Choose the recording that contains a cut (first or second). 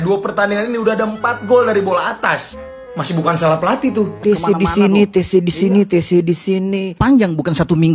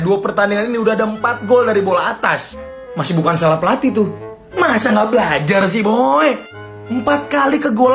first